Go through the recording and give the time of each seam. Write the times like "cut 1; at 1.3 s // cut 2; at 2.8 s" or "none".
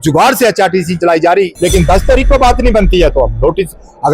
cut 1; at 1.4 s